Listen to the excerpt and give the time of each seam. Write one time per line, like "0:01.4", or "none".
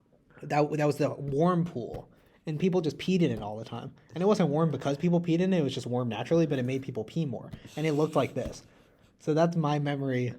none